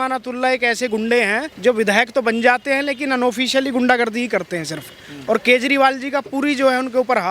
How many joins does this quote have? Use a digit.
1